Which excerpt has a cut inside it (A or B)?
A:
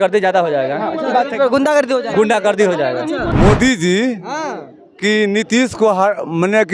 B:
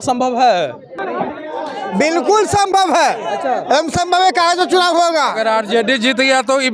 A